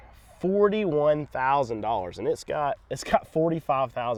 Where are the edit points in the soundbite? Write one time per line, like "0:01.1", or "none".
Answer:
none